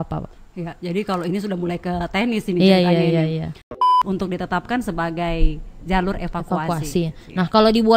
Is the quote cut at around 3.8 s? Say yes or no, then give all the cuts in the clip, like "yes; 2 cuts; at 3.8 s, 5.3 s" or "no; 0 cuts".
yes; 1 cut; at 3.8 s